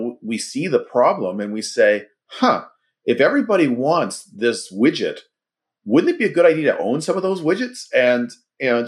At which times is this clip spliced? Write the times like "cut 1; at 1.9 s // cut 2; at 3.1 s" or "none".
none